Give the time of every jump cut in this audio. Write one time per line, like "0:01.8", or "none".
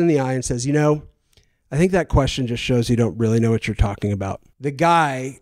0:04.4